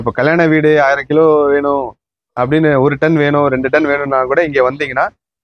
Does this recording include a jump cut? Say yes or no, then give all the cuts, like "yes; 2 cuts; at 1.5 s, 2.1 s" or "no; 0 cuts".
no; 0 cuts